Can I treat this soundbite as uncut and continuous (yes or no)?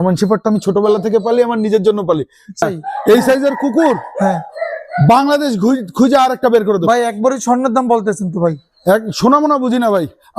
no